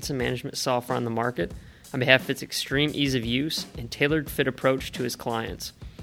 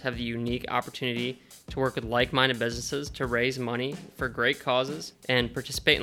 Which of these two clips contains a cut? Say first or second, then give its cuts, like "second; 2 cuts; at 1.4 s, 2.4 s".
second; 1 cut; at 5.1 s